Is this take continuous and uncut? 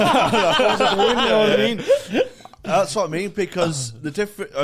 yes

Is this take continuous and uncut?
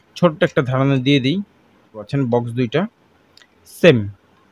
no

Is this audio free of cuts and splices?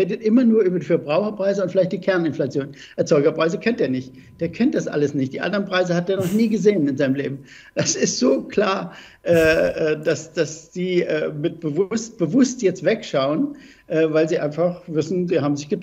yes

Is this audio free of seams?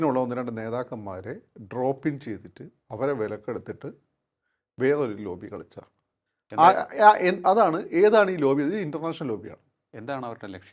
yes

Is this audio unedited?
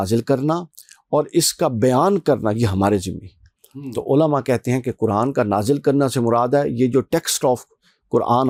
yes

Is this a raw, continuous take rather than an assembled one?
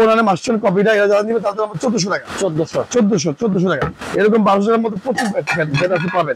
yes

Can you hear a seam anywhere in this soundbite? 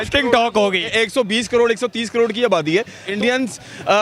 yes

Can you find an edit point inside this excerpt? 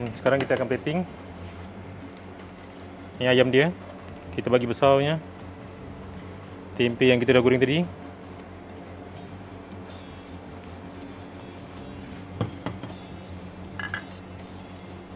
no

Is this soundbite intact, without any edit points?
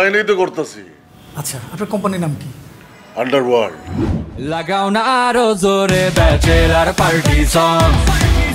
no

